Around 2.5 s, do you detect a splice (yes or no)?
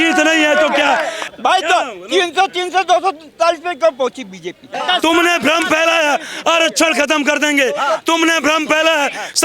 no